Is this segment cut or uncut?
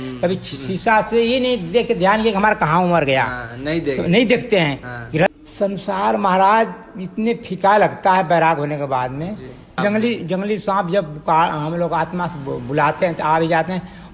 cut